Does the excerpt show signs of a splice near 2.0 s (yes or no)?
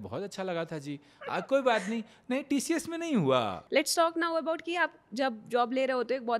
no